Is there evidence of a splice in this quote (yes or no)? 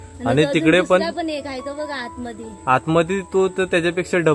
no